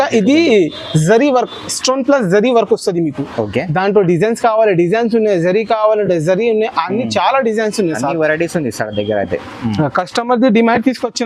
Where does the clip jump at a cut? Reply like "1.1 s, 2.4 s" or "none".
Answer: none

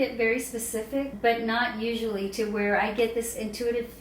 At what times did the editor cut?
1.1 s

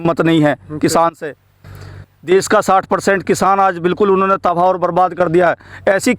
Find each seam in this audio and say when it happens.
none

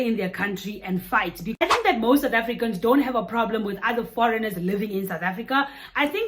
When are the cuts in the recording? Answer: 1.6 s

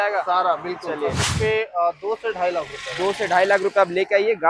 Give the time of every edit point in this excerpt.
1.3 s

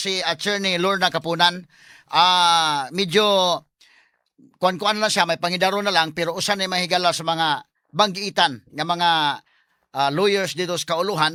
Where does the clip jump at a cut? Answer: none

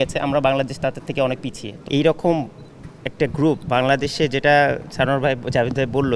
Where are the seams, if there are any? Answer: 1.7 s

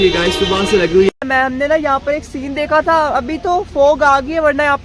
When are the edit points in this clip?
1.1 s

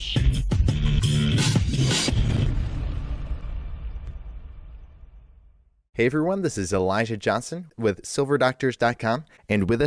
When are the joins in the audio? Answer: none

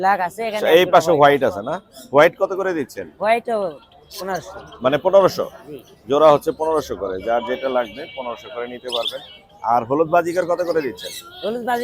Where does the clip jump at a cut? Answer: none

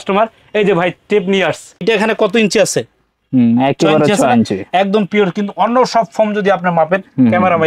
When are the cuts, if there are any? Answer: 1.8 s

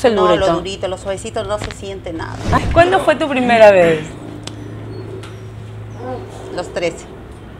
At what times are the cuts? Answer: 2.5 s

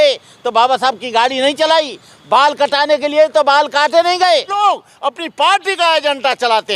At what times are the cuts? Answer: 4.6 s

